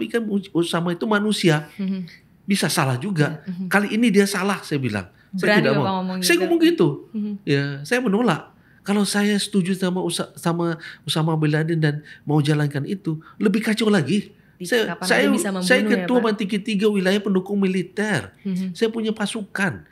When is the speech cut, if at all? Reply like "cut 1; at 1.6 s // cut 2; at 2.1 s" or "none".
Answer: none